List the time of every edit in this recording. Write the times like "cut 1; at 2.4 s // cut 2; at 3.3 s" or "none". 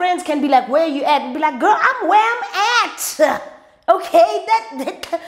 none

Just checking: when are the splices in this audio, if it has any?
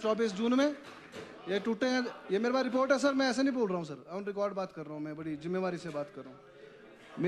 none

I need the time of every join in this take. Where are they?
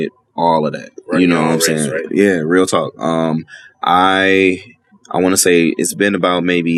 none

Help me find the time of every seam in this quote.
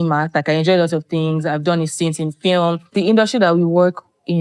cut 1; at 2.9 s

